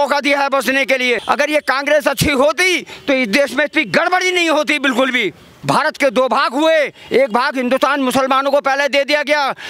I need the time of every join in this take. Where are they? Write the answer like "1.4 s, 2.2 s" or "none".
1.2 s, 5.5 s

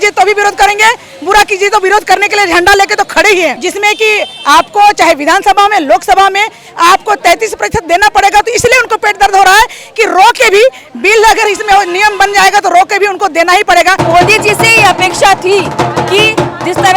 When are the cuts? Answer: 3.6 s, 14.0 s

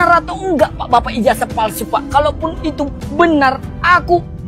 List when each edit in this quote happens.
3.0 s

